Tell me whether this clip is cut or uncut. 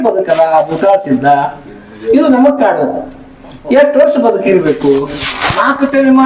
uncut